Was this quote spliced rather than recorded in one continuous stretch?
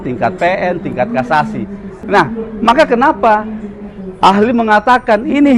yes; 1 cut; at 1.9 s

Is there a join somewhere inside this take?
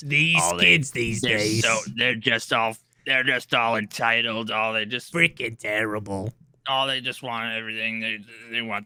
no; 0 cuts

